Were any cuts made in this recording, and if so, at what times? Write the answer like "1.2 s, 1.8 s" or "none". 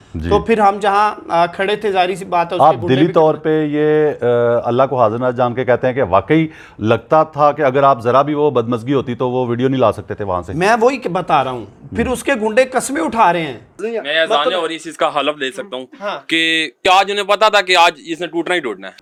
none